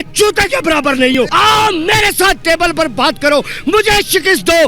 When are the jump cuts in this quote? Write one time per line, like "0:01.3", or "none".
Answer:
0:01.3